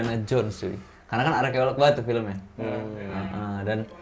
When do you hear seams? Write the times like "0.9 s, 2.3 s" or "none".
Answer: none